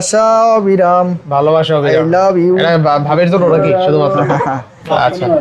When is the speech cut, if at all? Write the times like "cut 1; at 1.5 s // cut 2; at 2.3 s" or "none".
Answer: none